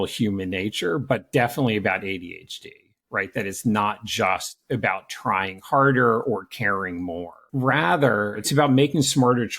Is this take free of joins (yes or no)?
no